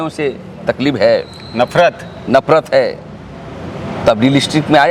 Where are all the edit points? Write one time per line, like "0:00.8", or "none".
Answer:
none